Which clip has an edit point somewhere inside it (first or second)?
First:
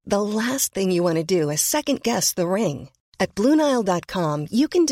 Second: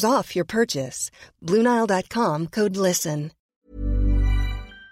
second